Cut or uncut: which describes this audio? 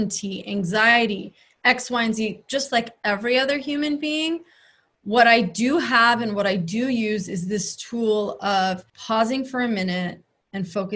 cut